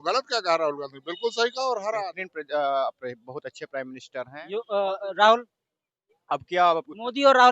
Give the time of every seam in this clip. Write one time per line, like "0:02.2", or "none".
0:02.2